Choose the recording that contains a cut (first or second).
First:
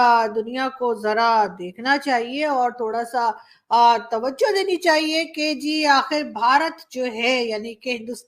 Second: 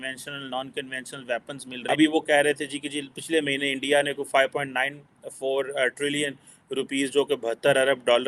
second